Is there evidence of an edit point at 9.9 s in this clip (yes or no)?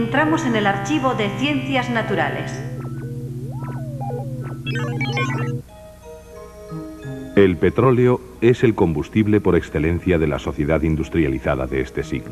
no